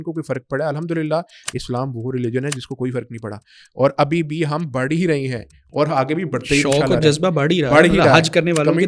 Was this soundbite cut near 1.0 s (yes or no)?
no